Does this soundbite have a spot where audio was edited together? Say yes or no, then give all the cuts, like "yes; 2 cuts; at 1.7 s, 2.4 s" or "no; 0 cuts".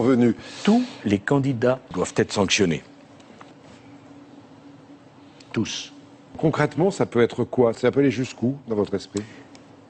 yes; 1 cut; at 5.7 s